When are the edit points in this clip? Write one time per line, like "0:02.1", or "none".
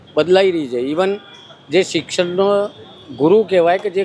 none